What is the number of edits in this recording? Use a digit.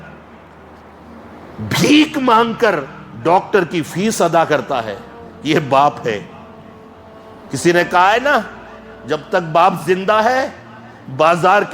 1